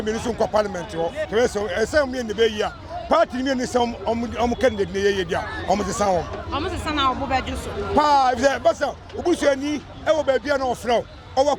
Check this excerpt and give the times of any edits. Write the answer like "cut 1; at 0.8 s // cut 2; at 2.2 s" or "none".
cut 1; at 1.2 s